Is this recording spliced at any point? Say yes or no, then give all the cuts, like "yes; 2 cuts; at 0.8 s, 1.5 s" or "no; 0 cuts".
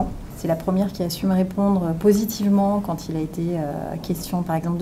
no; 0 cuts